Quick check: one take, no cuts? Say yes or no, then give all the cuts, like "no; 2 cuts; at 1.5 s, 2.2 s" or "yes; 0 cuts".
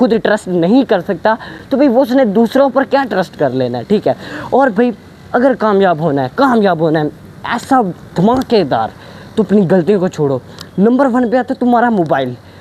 yes; 0 cuts